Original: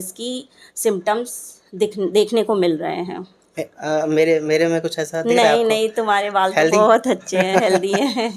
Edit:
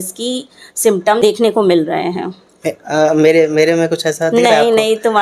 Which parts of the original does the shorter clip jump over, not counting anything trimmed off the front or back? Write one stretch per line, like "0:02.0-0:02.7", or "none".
0:01.2-0:02.1